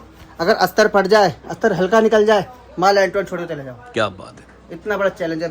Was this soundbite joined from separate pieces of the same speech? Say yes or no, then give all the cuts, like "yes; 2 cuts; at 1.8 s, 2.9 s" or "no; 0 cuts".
no; 0 cuts